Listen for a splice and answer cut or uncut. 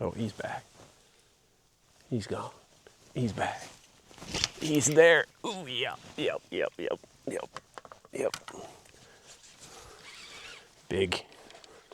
uncut